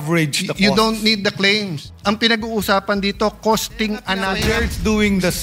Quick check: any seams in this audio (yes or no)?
yes